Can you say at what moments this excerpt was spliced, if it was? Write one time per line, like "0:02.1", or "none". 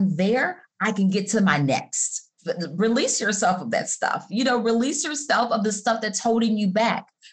0:02.3